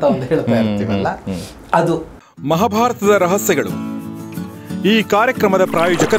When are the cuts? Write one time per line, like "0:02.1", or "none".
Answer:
0:02.1